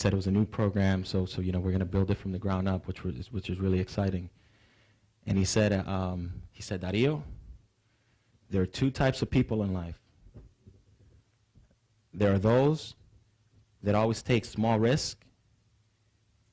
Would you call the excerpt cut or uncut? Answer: cut